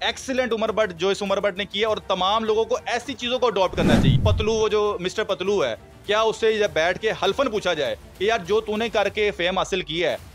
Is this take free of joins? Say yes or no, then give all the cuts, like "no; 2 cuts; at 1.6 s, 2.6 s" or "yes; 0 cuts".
no; 1 cut; at 4.1 s